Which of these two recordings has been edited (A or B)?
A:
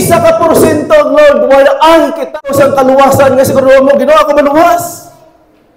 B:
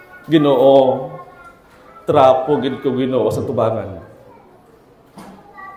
A